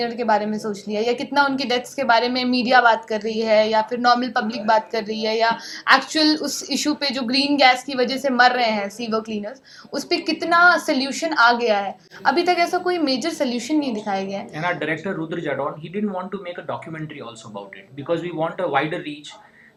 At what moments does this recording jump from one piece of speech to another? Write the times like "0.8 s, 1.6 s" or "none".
none